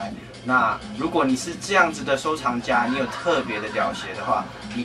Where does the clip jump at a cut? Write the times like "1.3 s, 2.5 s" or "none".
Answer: none